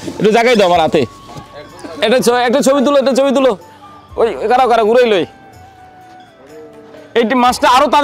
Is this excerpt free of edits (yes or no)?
yes